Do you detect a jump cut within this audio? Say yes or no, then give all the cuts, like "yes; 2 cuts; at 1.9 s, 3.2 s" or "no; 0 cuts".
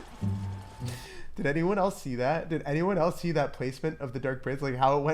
yes; 1 cut; at 1.0 s